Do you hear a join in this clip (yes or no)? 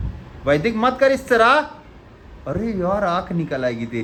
no